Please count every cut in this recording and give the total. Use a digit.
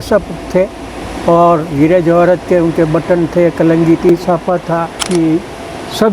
1